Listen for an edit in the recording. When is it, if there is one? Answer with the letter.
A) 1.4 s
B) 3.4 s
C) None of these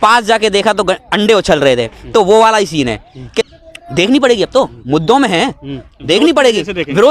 B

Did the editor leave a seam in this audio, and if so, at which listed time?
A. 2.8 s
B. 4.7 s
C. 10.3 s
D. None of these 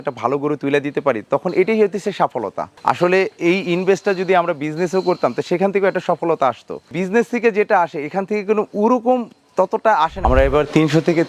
C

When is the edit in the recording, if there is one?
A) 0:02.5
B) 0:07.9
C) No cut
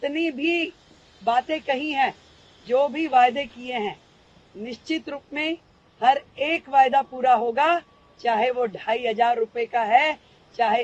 C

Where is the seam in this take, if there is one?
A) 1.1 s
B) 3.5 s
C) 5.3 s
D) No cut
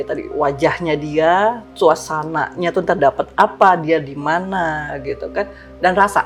D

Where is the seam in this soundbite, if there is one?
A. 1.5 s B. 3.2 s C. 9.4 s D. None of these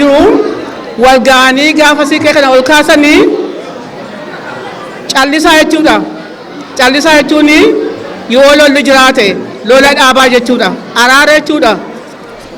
D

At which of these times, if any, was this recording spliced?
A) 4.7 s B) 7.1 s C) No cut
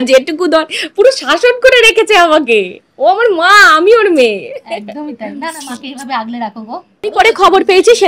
B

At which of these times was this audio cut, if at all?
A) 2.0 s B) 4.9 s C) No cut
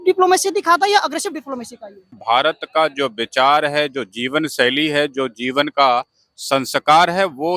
A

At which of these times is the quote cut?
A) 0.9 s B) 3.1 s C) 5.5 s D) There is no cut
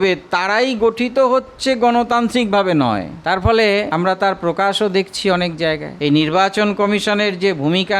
D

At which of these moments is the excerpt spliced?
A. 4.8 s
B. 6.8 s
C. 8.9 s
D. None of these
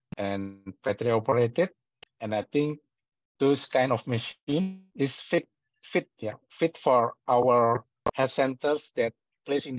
A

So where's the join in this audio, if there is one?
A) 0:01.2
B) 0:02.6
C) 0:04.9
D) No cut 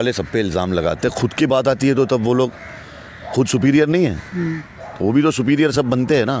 D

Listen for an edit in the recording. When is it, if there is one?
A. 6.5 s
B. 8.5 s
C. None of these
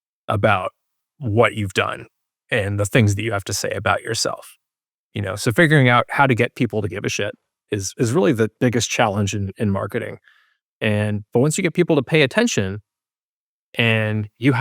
B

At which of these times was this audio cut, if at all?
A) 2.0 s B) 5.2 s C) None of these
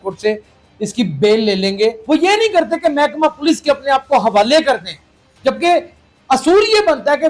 A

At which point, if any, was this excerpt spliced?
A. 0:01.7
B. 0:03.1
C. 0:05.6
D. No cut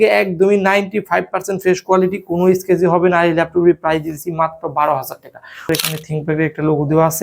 C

